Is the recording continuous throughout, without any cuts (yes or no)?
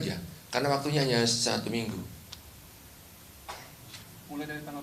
yes